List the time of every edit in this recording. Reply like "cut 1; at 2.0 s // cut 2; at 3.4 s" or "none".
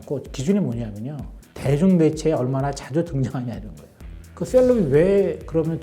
cut 1; at 4.3 s